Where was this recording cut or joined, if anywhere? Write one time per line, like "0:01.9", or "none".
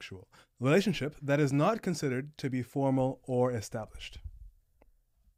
none